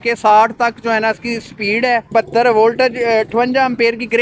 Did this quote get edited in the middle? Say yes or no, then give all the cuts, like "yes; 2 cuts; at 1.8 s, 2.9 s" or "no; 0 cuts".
yes; 1 cut; at 2.1 s